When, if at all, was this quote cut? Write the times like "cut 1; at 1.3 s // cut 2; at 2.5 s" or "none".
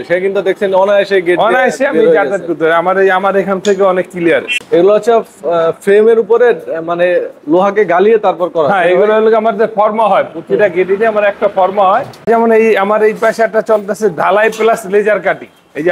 cut 1; at 4.5 s // cut 2; at 12.3 s